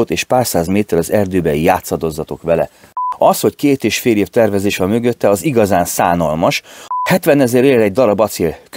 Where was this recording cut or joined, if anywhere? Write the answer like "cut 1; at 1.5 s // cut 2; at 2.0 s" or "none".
cut 1; at 3.0 s // cut 2; at 6.9 s